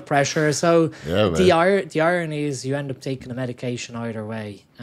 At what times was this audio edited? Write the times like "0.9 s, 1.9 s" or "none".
none